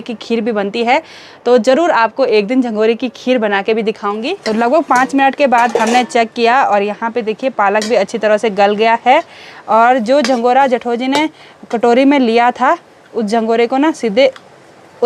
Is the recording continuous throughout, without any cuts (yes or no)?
yes